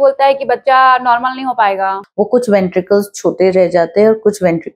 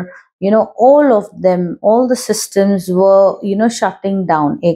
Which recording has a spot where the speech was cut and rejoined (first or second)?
first